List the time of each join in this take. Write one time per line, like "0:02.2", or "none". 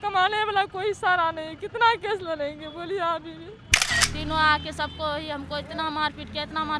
0:03.9